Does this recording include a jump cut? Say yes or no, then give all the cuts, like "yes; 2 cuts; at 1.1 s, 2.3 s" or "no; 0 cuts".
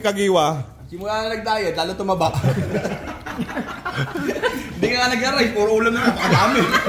no; 0 cuts